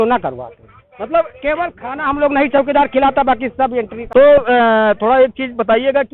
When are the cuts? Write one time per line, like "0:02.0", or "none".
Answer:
0:03.9